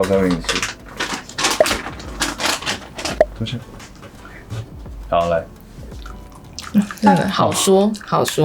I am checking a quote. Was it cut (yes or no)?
yes